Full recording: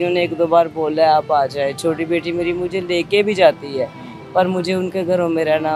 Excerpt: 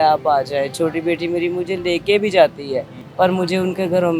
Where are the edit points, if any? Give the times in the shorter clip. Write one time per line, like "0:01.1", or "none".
0:03.0